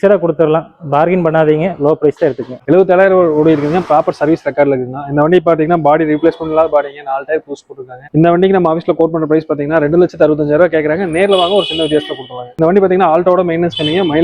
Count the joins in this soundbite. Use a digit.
1